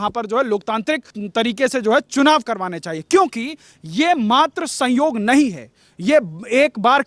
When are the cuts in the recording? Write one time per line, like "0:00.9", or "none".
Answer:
0:01.1